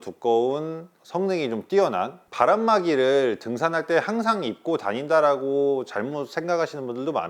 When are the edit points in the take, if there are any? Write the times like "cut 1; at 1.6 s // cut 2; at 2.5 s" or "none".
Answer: cut 1; at 2.2 s